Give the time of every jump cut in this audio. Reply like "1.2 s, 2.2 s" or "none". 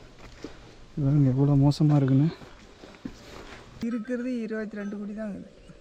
3.8 s